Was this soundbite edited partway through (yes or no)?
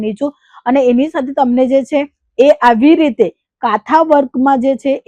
no